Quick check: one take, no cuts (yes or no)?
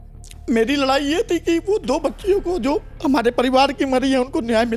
yes